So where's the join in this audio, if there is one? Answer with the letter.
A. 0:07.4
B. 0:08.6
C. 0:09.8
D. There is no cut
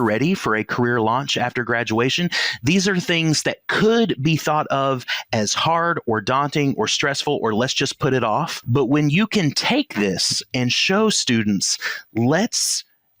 B